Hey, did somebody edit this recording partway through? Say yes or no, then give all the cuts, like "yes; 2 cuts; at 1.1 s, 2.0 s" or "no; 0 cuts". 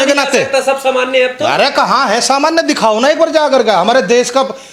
no; 0 cuts